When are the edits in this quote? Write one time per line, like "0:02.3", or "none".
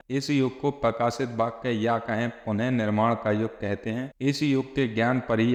none